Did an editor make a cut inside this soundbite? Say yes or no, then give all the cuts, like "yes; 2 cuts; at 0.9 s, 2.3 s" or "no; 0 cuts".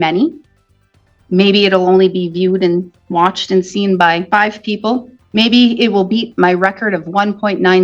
yes; 2 cuts; at 4.3 s, 5.2 s